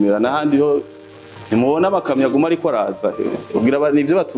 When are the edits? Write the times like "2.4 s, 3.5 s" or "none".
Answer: none

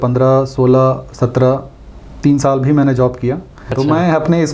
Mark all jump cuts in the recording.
3.6 s

